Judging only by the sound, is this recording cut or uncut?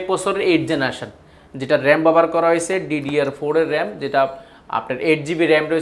uncut